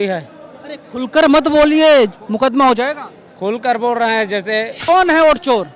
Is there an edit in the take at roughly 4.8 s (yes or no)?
yes